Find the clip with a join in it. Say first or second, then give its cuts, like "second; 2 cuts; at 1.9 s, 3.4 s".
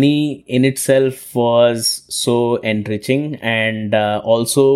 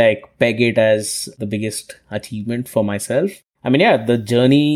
second; 2 cuts; at 1.3 s, 3.3 s